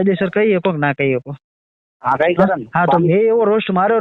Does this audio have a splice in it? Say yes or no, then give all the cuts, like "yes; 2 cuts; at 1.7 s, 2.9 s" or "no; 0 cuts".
no; 0 cuts